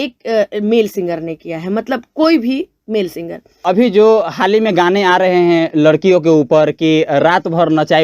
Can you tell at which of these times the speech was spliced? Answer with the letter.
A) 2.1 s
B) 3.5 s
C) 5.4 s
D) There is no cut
B